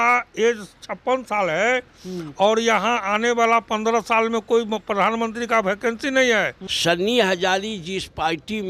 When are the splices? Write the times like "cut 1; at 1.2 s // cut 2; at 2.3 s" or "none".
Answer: cut 1; at 6.6 s